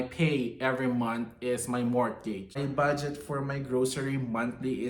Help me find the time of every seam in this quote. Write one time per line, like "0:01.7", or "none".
0:02.6